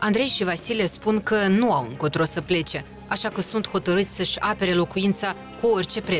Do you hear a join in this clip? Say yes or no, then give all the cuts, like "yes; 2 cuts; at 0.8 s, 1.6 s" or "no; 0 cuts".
no; 0 cuts